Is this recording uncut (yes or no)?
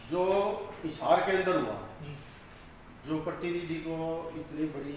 yes